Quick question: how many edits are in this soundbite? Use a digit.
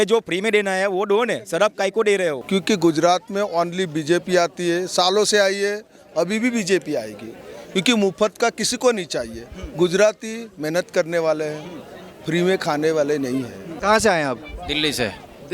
2